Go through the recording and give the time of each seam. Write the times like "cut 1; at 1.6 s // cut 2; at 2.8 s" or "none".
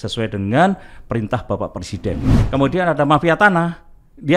cut 1; at 2.4 s